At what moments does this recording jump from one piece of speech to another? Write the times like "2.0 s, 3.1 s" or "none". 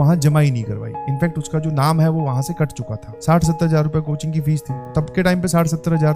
3.1 s, 4.9 s